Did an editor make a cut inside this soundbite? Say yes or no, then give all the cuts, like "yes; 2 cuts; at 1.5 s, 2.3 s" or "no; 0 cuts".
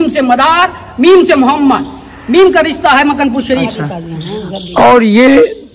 yes; 1 cut; at 3.8 s